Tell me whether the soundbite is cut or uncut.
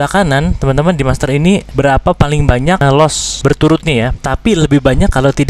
cut